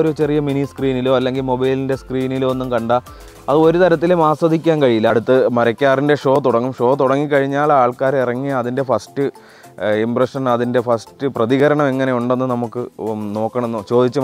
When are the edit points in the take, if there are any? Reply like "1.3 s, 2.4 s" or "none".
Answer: 5.1 s

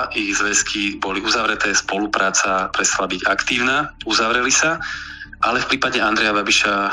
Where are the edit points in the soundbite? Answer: none

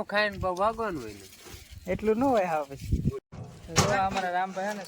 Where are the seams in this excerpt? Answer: 3.3 s

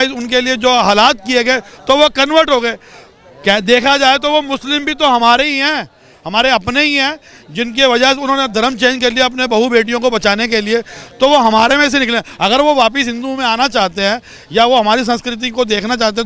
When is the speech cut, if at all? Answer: none

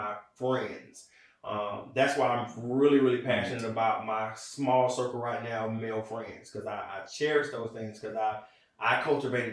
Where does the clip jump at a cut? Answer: none

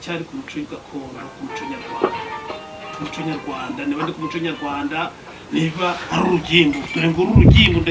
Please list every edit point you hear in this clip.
none

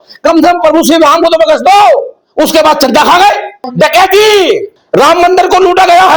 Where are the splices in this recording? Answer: 2.2 s, 3.7 s, 4.7 s

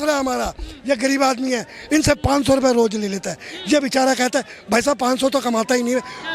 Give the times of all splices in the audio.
none

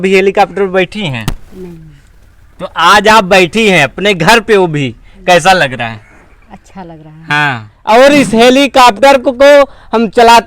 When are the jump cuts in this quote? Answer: 7.7 s

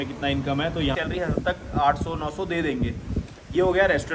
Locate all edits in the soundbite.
0.9 s

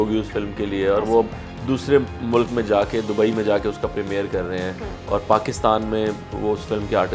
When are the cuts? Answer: none

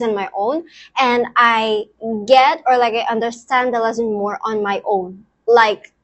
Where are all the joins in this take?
none

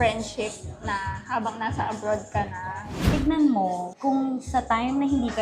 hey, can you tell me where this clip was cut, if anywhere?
3.0 s, 3.9 s

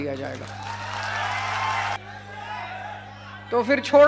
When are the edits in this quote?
2.0 s

